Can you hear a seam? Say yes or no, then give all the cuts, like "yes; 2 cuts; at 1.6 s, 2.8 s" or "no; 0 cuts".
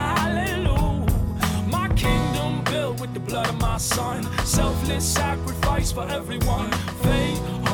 no; 0 cuts